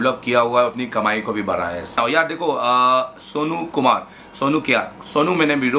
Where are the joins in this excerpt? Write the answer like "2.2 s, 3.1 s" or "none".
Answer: 2.0 s